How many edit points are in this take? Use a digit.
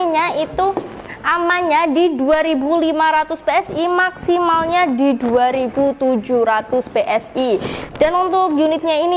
1